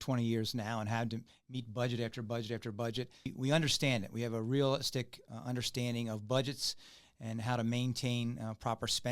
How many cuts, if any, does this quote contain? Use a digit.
1